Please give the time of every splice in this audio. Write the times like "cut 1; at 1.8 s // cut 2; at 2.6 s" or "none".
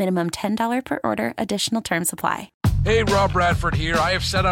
cut 1; at 2.5 s